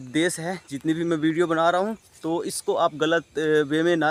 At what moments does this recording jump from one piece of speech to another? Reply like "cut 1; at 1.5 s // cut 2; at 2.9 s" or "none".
none